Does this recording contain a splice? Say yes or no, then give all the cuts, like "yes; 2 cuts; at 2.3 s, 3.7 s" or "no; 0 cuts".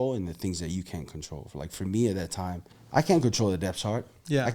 yes; 1 cut; at 2.7 s